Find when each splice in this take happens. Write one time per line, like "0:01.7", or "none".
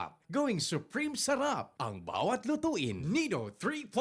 0:03.0